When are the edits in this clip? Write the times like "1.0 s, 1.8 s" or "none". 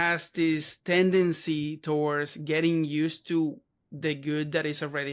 none